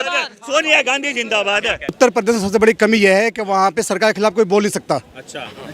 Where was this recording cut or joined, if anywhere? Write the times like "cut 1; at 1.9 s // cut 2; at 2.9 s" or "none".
cut 1; at 2.0 s